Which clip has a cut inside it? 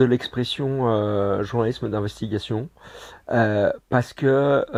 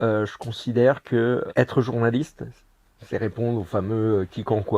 second; 1 cut; at 1.5 s

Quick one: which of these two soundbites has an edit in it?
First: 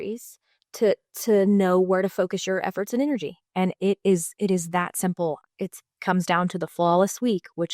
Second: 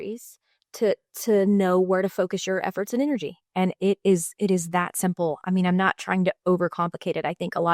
first; 1 cut; at 5.4 s

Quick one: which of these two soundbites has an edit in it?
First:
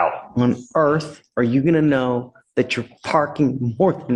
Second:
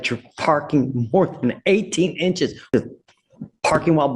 second; 1 cut; at 2.6 s

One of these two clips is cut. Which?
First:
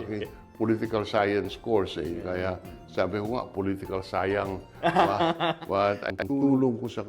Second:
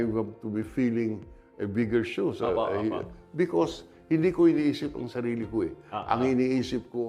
first; 1 cut; at 6.1 s

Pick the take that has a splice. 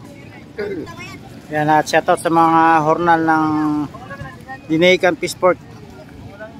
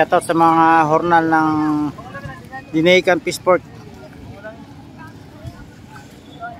first; 1 cut; at 0.9 s

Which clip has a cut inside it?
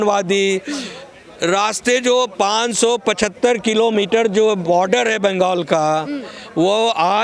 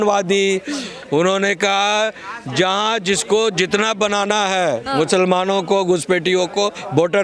second; 1 cut; at 0.9 s

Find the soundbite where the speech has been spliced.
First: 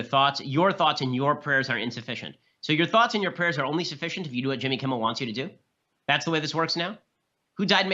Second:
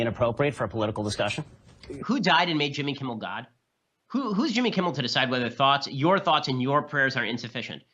first; 1 cut; at 5.3 s

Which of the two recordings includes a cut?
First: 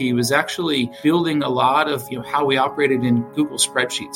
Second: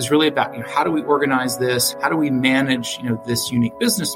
second; 1 cut; at 1.9 s

